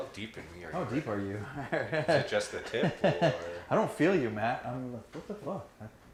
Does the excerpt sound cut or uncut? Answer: uncut